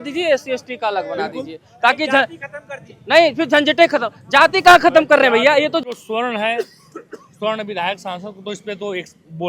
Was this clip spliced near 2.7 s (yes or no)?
no